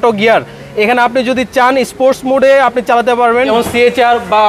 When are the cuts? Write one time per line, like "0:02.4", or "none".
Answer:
0:03.5